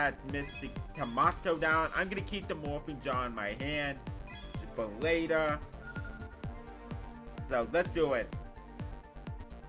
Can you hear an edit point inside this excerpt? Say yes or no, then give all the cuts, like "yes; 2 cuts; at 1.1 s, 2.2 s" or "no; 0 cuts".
no; 0 cuts